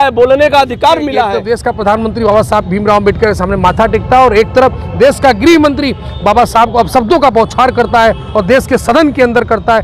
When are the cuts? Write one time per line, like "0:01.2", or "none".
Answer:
0:01.4